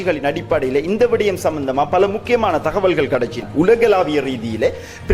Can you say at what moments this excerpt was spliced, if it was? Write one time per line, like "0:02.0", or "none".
0:03.4